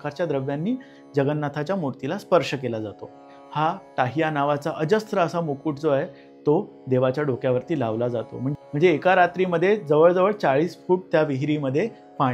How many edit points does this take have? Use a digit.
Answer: 2